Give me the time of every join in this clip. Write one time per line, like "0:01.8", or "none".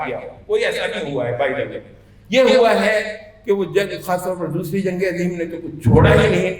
none